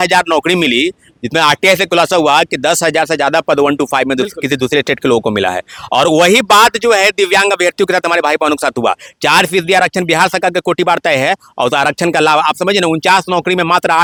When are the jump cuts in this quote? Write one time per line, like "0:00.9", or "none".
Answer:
none